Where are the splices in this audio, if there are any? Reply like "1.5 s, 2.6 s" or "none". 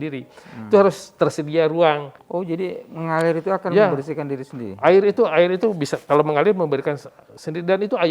2.2 s